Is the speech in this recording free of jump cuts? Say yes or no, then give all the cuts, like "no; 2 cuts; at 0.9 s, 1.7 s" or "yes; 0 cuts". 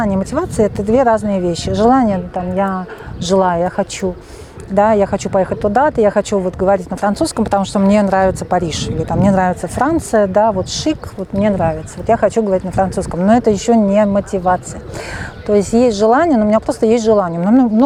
yes; 0 cuts